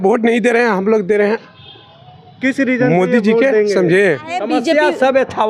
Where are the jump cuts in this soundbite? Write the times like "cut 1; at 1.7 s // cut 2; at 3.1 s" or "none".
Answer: cut 1; at 4.4 s